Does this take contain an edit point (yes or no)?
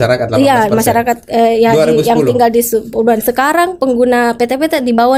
no